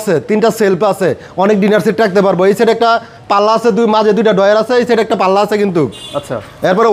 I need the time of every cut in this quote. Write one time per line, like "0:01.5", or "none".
none